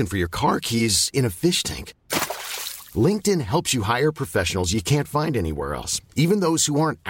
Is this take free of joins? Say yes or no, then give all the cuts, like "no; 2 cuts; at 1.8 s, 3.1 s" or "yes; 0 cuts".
yes; 0 cuts